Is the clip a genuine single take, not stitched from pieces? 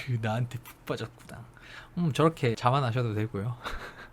no; 1 cut; at 2.6 s

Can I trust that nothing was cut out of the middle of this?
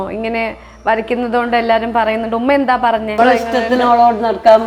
no; 1 cut; at 3.2 s

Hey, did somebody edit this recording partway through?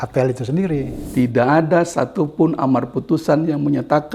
yes; 1 cut; at 1.0 s

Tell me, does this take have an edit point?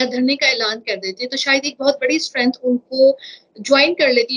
no; 0 cuts

